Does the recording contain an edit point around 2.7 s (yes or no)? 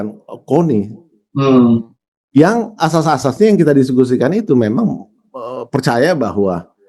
no